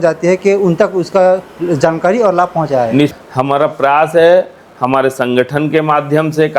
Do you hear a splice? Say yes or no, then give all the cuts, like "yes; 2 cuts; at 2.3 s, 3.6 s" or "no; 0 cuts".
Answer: yes; 1 cut; at 3.1 s